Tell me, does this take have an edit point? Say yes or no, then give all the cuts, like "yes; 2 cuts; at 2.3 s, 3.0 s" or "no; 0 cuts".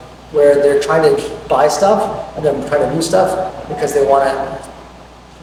no; 0 cuts